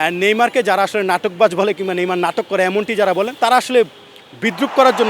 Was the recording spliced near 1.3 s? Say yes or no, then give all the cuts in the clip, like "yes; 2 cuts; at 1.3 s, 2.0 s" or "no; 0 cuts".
no; 1 cut; at 3.3 s